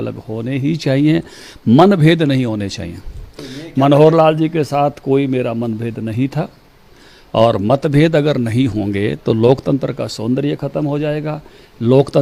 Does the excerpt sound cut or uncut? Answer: uncut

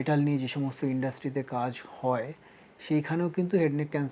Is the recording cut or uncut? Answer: uncut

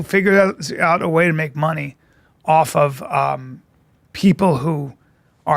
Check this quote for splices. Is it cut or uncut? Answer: uncut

